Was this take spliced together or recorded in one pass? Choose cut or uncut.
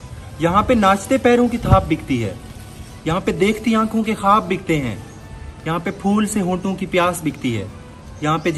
uncut